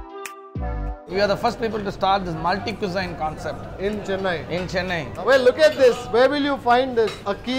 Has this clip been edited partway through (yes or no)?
yes